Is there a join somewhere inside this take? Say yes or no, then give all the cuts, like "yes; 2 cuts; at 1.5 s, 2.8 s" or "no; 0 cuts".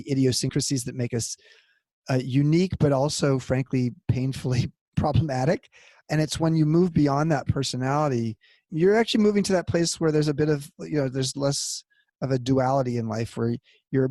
no; 0 cuts